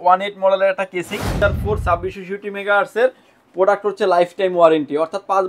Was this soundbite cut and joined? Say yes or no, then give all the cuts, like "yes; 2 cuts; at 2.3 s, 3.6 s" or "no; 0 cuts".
yes; 1 cut; at 1.4 s